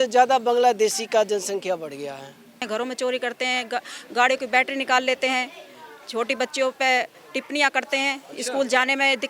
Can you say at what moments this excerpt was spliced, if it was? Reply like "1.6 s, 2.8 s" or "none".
2.6 s